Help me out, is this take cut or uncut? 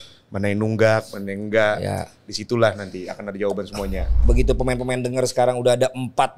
cut